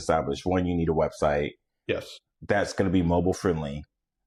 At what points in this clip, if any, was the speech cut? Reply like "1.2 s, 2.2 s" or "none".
none